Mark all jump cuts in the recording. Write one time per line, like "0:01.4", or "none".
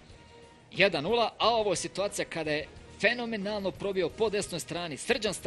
none